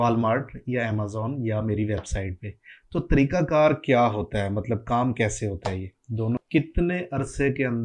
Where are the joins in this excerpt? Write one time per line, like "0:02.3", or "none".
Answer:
0:06.4